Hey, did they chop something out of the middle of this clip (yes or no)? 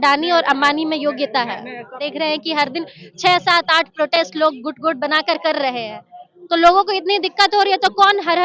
yes